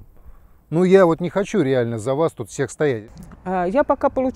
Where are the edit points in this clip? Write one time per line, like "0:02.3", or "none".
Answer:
0:03.1